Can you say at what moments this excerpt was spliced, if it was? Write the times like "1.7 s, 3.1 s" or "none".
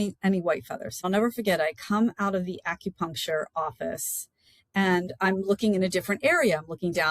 1.0 s